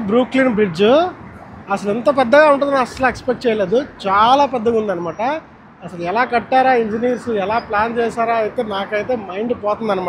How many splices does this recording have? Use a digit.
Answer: 0